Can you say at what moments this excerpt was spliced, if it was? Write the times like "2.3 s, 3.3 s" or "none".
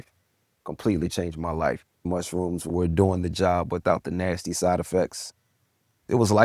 2.0 s